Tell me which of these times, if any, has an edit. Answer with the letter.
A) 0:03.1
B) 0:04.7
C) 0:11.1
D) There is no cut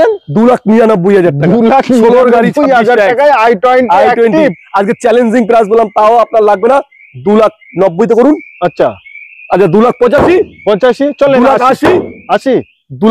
D